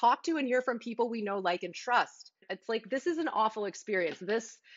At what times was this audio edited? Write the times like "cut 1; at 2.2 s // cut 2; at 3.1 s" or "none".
cut 1; at 2.5 s